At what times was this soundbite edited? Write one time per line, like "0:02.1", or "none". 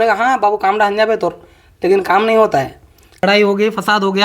0:03.2